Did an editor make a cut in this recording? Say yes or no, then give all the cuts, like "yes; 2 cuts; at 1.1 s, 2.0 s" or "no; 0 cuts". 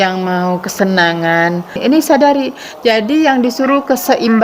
yes; 1 cut; at 1.8 s